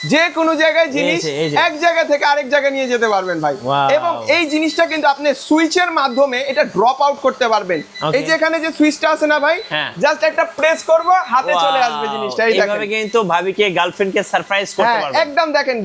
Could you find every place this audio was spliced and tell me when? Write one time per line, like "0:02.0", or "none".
none